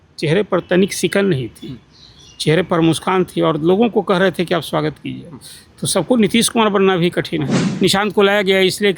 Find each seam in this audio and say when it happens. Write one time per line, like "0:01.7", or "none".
0:07.6